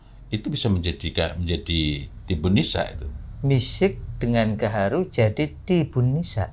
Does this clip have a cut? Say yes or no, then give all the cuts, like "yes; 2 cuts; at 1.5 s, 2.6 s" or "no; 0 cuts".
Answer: no; 0 cuts